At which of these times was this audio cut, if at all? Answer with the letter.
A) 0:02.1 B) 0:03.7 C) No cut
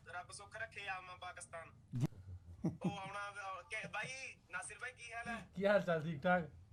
C